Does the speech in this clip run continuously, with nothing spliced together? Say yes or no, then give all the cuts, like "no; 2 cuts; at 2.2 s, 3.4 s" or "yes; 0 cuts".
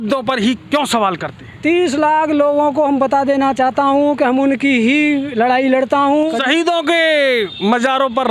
no; 1 cut; at 6.4 s